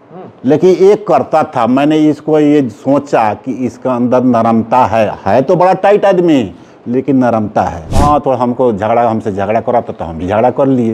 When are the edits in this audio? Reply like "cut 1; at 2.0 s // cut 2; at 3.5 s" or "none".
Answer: cut 1; at 7.8 s